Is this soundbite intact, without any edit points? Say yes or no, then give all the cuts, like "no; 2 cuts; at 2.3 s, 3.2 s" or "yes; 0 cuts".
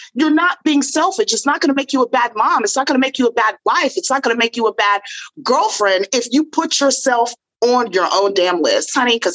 yes; 0 cuts